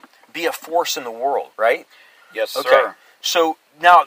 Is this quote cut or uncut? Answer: cut